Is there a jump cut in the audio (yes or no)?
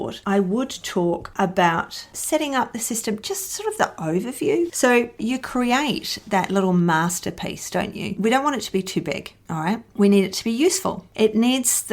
yes